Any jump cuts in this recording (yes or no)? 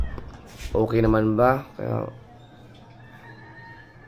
no